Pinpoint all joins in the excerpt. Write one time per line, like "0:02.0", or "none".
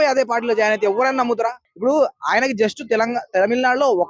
0:01.7